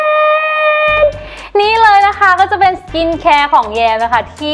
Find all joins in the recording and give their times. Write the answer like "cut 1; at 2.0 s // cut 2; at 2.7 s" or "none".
none